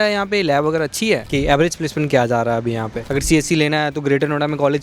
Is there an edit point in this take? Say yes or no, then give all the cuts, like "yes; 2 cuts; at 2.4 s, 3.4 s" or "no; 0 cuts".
yes; 2 cuts; at 1.3 s, 3.0 s